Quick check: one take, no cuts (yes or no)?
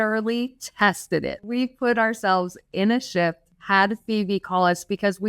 no